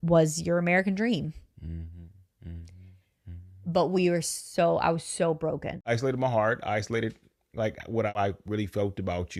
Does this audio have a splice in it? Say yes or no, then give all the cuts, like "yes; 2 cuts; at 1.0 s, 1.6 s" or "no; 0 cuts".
yes; 2 cuts; at 5.8 s, 8.2 s